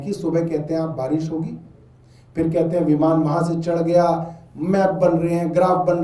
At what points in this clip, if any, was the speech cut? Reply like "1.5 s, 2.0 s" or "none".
none